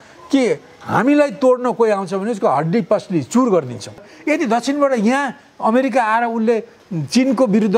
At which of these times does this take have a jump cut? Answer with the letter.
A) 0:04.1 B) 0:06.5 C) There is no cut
A